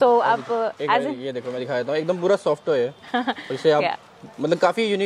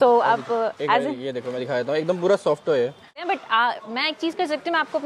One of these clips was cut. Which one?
second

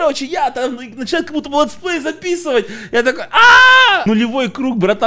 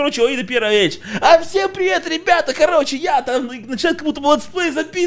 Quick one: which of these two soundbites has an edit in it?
first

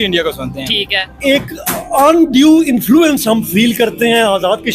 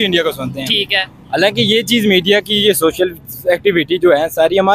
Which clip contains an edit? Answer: first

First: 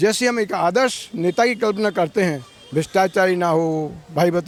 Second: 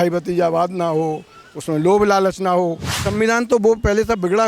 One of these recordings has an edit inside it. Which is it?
second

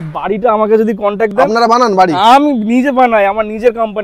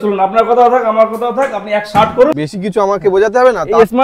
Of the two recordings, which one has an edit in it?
second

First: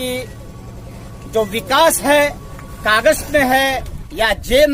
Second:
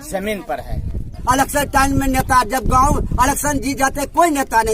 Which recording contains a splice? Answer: second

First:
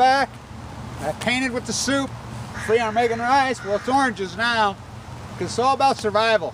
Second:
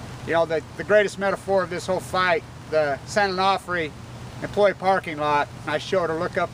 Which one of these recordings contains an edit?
second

